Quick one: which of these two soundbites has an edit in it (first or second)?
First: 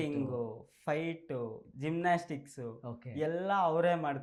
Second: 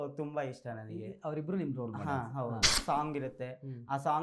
second